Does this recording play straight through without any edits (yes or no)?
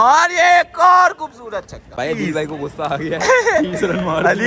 no